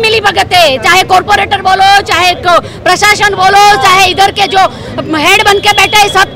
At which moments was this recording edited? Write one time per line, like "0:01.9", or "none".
none

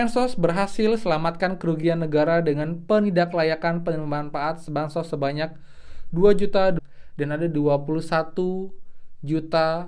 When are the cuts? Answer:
0:06.8

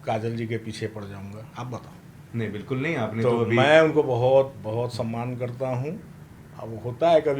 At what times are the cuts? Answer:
none

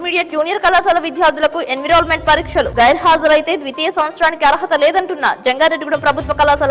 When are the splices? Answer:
none

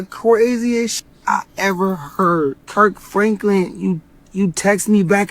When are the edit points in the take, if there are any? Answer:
0:02.6

